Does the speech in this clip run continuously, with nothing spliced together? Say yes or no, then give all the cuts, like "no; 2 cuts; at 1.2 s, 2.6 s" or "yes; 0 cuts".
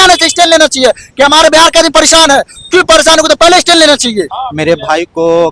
no; 1 cut; at 4.4 s